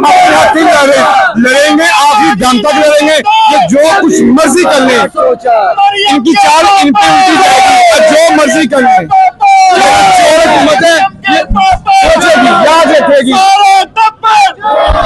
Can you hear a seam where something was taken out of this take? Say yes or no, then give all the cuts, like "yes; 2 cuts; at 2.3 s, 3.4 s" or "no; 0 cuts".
no; 0 cuts